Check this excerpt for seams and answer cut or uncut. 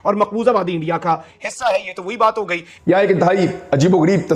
uncut